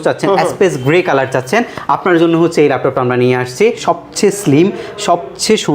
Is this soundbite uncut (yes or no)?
no